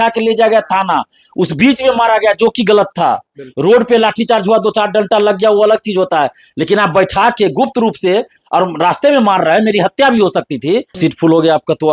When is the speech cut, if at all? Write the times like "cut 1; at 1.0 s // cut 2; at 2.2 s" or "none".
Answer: cut 1; at 11.0 s